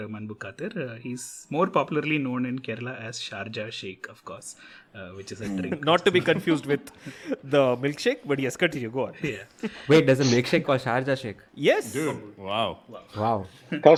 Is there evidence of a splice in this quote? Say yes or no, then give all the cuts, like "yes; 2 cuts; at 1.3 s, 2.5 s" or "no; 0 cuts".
no; 0 cuts